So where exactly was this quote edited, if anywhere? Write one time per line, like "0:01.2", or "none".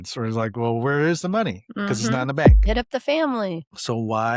0:02.6